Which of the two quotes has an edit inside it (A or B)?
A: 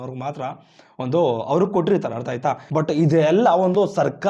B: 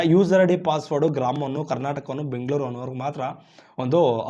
A